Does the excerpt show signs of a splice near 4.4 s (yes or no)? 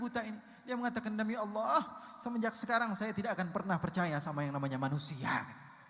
no